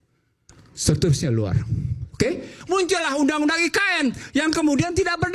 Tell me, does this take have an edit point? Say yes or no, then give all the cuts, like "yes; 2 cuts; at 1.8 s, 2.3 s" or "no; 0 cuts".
yes; 1 cut; at 2.5 s